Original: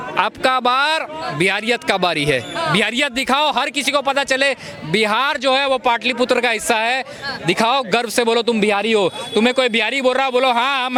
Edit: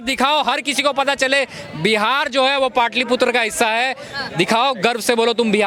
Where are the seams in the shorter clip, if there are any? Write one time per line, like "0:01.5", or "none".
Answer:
none